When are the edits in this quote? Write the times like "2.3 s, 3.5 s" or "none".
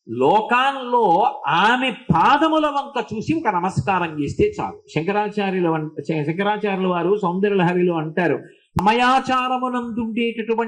8.7 s

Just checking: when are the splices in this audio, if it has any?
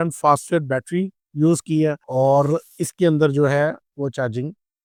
none

